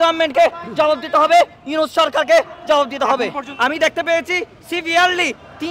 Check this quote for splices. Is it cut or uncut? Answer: cut